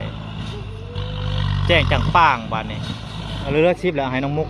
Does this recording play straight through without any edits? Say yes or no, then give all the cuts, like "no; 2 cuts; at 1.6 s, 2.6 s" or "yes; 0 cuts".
no; 1 cut; at 3.5 s